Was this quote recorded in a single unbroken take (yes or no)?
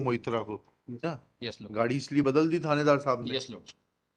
no